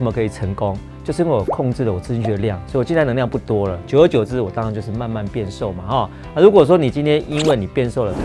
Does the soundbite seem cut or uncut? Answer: cut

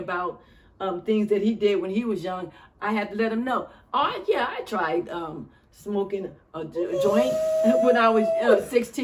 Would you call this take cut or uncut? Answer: uncut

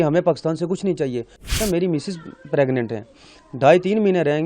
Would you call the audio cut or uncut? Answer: cut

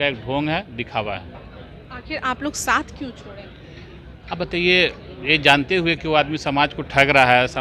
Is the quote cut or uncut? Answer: uncut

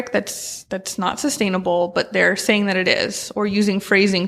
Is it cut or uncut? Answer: uncut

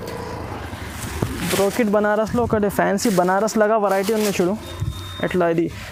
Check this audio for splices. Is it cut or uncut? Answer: uncut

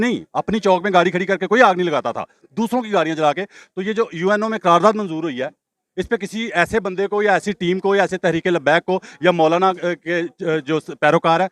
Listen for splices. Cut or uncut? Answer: uncut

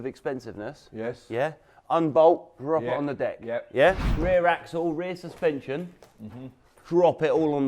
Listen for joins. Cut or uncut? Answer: cut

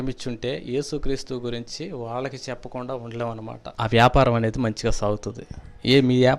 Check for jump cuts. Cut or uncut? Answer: cut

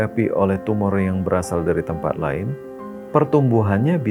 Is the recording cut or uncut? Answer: uncut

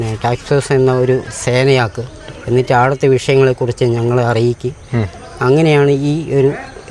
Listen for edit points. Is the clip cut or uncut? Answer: uncut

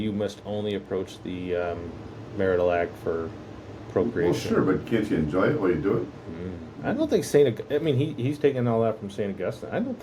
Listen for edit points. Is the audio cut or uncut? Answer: uncut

